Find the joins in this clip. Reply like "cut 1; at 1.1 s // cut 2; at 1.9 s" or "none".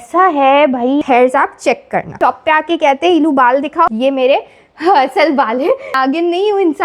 cut 1; at 1.0 s // cut 2; at 2.1 s // cut 3; at 3.9 s // cut 4; at 5.9 s